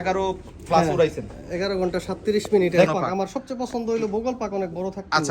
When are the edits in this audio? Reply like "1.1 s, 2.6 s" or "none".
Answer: 2.9 s